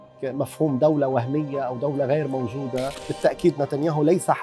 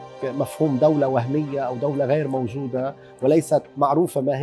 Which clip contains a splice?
first; 1 cut; at 3.0 s

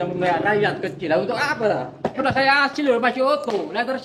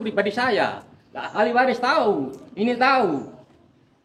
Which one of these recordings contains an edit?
first; 1 cut; at 2.2 s

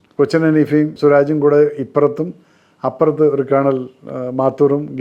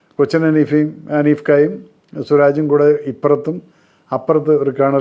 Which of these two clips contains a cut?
first; 1 cut; at 0.9 s

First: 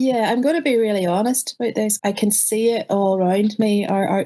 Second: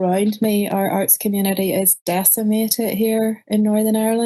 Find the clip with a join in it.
first; 1 cut; at 2.0 s

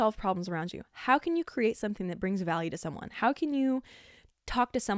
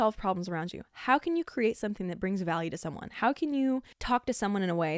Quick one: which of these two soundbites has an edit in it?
second; 1 cut; at 3.9 s

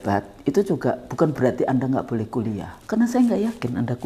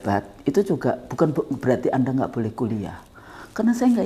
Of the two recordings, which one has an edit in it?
first; 2 cuts; at 1.3 s, 2.7 s

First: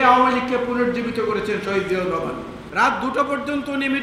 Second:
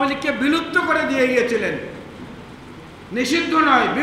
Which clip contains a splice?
first; 1 cut; at 2.6 s

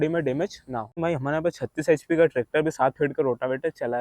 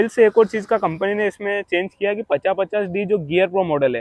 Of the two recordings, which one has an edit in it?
first; 1 cut; at 1.0 s

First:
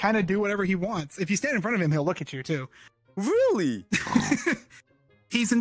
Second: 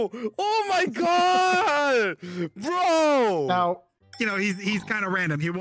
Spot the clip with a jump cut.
second; 1 cut; at 4.0 s

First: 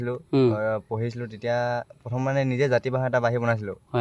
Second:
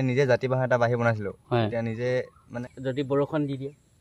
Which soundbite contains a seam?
second; 1 cut; at 2.5 s

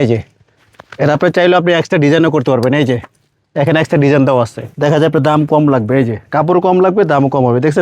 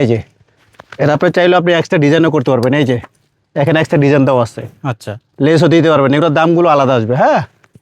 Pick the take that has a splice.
first; 1 cut; at 4.6 s

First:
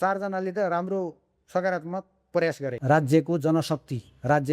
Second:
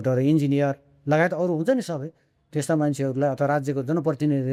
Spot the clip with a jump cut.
first; 1 cut; at 2.7 s

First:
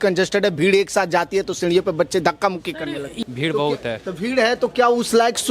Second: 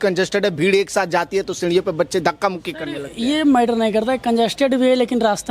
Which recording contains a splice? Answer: first; 1 cut; at 3.2 s

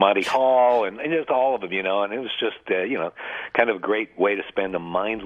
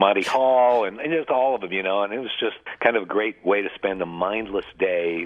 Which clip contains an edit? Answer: second; 1 cut; at 2.6 s

